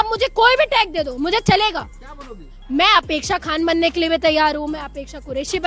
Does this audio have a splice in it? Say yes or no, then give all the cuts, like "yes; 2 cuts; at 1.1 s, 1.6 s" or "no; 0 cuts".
no; 0 cuts